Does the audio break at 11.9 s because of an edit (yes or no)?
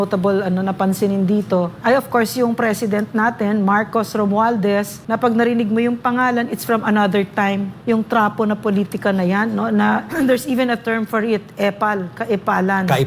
no